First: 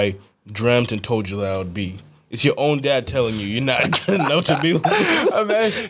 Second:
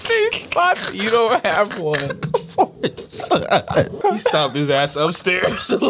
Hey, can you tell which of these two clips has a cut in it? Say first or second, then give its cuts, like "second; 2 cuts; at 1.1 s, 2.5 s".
second; 1 cut; at 3.9 s